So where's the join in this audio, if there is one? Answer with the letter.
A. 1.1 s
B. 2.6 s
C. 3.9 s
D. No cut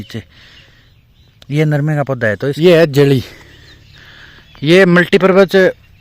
B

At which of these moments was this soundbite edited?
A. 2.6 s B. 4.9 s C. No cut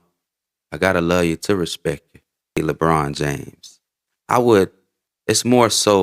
A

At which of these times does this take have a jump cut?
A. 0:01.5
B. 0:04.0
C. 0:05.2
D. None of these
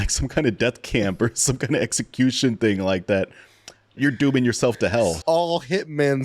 C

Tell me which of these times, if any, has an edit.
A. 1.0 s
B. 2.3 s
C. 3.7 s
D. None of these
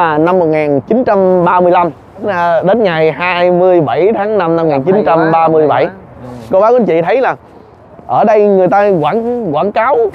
B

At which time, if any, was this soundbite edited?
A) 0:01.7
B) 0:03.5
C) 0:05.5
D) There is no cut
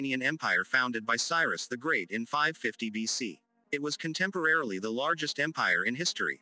B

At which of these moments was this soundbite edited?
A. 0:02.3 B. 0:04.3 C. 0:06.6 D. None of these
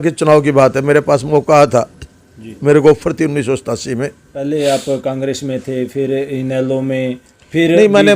B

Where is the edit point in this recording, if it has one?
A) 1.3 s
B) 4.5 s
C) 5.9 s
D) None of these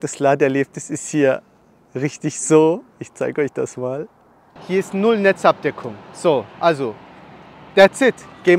B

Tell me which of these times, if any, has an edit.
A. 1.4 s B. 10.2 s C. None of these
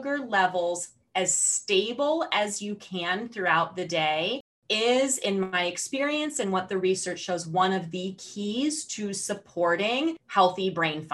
B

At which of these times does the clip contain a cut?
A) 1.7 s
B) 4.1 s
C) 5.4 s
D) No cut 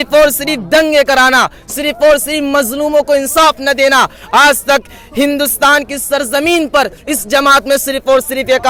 D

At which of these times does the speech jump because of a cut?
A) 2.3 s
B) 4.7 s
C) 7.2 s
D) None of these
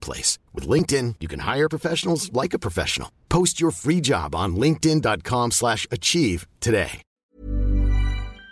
C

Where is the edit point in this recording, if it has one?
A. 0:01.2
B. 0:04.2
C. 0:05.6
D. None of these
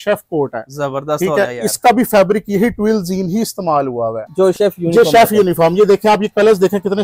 B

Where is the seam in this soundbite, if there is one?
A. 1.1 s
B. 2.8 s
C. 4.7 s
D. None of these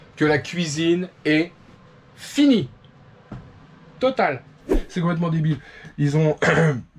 C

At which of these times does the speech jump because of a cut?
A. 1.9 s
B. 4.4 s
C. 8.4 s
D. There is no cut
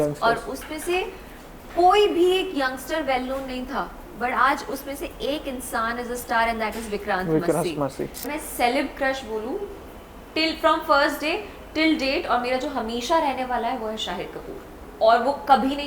C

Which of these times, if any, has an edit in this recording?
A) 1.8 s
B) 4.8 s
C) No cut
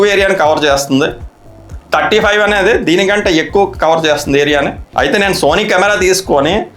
B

